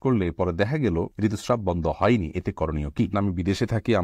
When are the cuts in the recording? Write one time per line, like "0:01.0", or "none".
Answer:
0:03.1